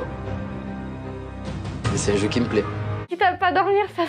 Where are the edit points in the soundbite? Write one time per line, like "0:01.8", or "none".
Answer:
0:03.0